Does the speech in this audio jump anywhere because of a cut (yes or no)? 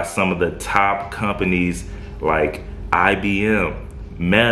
no